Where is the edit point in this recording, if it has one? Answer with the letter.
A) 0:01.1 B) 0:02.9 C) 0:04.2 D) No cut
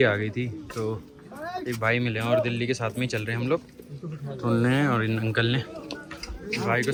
D